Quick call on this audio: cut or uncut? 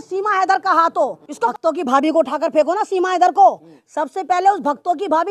cut